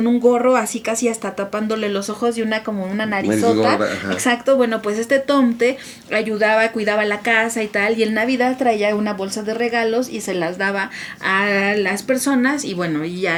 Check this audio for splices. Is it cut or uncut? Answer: uncut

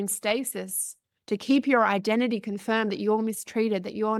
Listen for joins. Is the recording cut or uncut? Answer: uncut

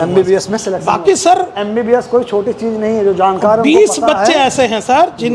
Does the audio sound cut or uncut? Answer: uncut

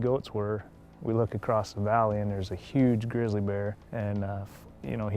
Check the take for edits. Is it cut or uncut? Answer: cut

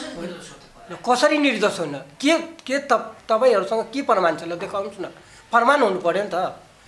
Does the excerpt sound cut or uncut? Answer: uncut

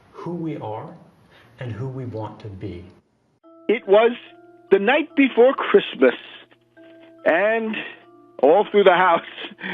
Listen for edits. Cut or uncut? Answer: cut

